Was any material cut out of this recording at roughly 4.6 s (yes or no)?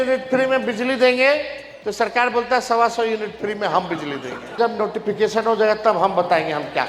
yes